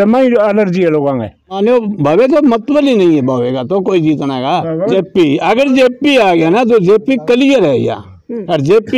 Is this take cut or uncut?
cut